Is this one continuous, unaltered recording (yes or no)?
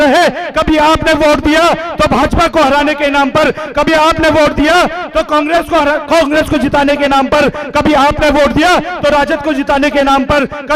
yes